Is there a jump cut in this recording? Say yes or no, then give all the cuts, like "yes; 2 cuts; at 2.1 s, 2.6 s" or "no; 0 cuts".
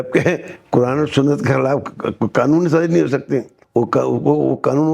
yes; 1 cut; at 3.6 s